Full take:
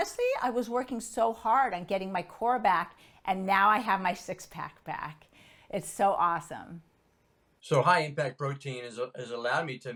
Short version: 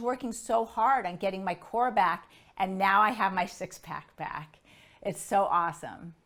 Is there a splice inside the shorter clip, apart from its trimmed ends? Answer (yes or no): no